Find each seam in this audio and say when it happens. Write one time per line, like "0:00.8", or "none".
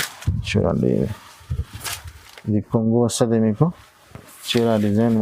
none